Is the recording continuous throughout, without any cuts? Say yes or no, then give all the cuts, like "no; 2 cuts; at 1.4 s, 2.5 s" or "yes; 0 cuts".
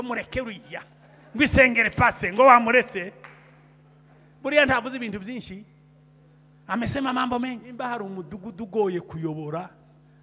no; 1 cut; at 8.0 s